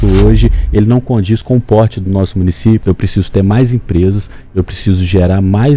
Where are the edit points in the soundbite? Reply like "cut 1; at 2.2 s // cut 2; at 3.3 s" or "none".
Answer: cut 1; at 2.8 s